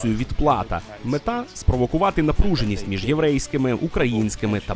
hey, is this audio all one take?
no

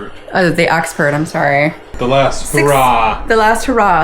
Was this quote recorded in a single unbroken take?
no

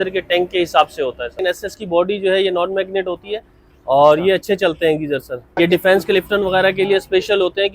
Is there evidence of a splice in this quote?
yes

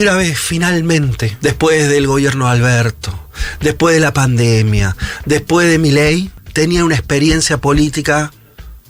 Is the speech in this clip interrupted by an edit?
yes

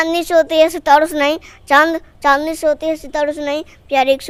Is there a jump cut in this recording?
no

